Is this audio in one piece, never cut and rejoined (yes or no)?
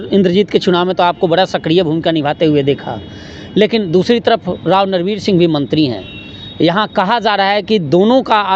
yes